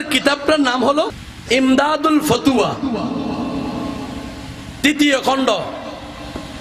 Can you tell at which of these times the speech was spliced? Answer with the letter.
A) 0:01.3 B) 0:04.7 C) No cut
A